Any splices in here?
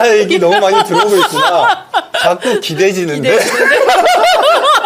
no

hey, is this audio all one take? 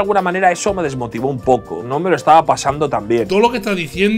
no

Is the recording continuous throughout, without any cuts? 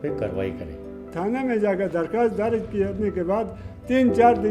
no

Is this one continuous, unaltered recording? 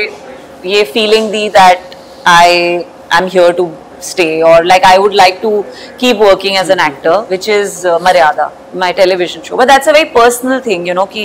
yes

